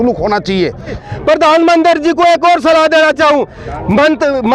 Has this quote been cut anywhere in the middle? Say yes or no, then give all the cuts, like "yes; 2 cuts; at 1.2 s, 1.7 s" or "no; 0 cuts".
yes; 1 cut; at 1.0 s